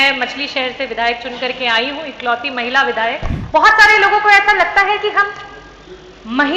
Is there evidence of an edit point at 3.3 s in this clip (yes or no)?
yes